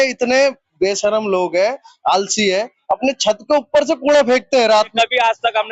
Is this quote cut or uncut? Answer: cut